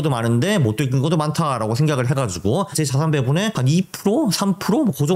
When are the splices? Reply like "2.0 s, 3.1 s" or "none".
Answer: 2.7 s, 3.6 s